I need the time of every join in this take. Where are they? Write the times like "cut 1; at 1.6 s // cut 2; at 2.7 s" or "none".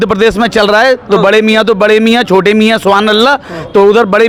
none